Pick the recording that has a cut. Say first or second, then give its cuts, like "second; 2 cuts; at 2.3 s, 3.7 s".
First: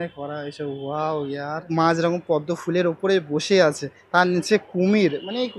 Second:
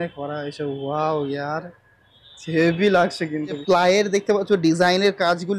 first; 1 cut; at 1.7 s